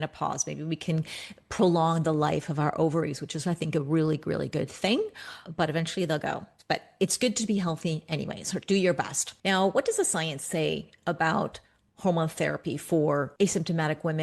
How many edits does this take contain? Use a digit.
2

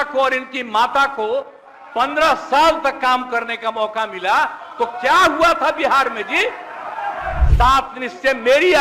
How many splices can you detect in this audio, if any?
1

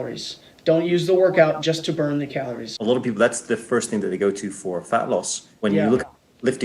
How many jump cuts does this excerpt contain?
1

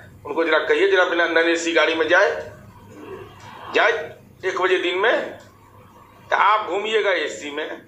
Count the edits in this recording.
0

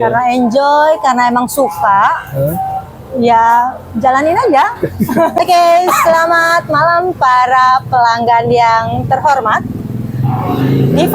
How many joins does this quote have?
1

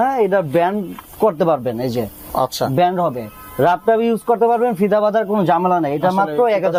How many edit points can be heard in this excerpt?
0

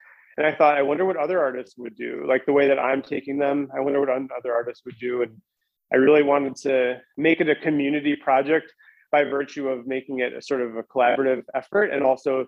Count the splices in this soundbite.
1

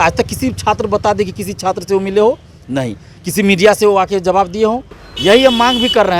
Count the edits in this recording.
1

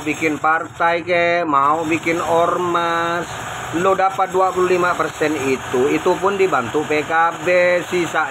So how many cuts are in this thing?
0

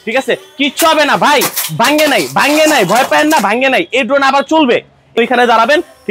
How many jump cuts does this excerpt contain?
1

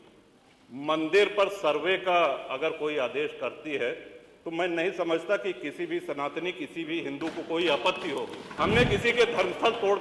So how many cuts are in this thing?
1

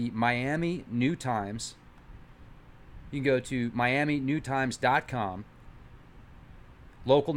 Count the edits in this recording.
1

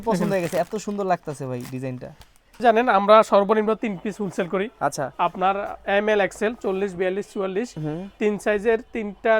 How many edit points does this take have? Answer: 1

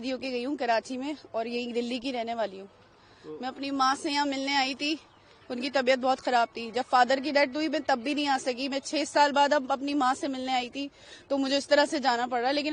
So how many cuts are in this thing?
0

